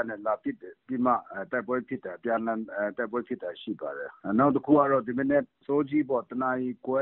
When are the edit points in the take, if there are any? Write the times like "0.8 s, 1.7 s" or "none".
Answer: 4.1 s, 5.6 s